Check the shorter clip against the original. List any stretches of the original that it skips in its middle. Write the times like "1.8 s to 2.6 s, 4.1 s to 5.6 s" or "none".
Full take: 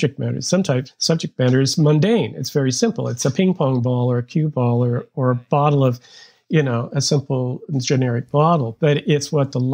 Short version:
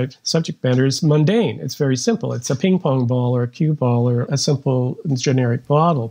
5.1 s to 6.9 s